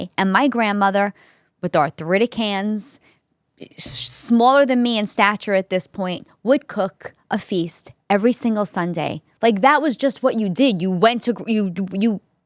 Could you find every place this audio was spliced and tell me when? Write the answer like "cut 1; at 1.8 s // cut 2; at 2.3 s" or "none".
cut 1; at 9.2 s